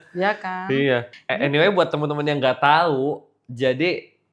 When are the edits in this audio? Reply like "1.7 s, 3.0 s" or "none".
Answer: 1.1 s